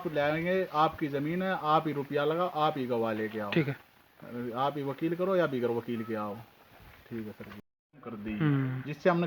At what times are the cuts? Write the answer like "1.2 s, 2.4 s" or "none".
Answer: 7.5 s